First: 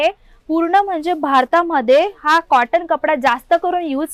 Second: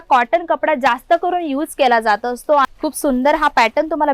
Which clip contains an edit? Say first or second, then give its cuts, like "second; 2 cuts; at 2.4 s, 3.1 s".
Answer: second; 1 cut; at 2.7 s